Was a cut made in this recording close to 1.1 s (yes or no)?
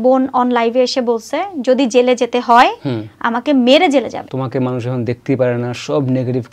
no